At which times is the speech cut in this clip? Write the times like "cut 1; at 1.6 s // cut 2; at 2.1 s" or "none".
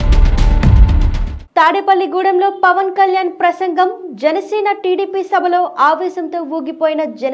cut 1; at 1.3 s